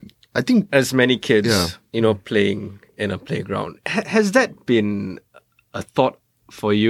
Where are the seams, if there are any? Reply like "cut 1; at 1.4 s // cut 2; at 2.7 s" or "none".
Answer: none